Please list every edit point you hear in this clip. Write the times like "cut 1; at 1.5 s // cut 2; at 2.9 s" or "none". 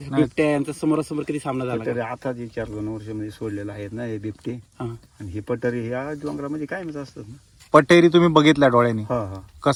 none